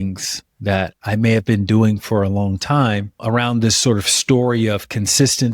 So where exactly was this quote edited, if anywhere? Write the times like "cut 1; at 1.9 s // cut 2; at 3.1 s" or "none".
none